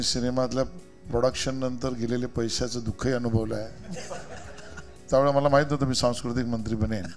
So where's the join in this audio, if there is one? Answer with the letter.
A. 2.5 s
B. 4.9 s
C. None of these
B